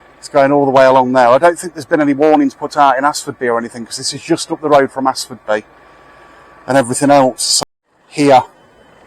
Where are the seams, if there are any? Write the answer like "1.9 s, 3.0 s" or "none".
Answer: 7.5 s